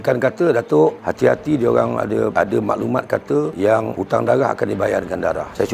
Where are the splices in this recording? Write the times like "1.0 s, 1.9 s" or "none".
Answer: none